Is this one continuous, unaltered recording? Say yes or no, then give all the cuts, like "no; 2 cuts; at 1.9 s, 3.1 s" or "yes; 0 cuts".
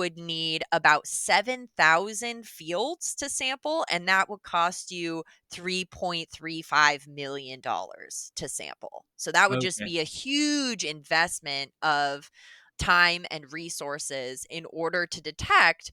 yes; 0 cuts